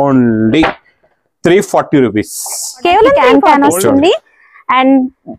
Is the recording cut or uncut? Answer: cut